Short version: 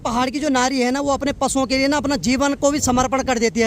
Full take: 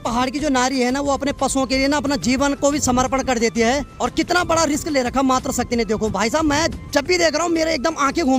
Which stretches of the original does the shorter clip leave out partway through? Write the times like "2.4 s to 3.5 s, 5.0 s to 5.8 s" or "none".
none